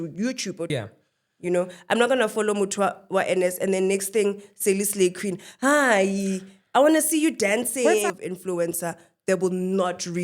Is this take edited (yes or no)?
yes